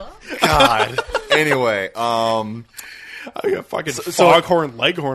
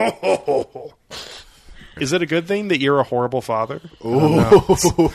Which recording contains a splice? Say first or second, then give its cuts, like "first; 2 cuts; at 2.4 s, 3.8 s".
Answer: second; 1 cut; at 1.9 s